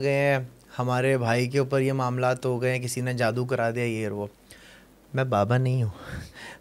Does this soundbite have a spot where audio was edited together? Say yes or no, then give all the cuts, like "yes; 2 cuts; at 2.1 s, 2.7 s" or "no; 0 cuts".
no; 0 cuts